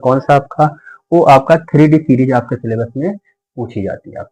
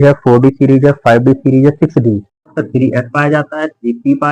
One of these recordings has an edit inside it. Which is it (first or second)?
second